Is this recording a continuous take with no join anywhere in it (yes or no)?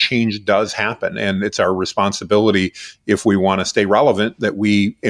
yes